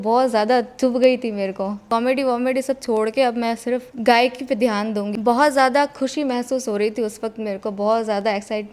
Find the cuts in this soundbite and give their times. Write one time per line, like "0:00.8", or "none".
0:01.9
0:05.1